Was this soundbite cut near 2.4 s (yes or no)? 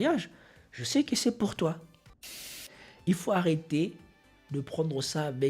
yes